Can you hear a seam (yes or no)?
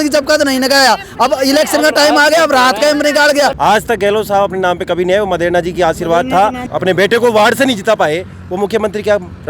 yes